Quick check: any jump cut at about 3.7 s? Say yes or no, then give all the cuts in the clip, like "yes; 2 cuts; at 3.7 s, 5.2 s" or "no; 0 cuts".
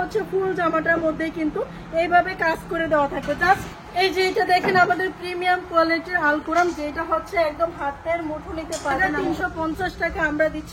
yes; 2 cuts; at 3.7 s, 9.0 s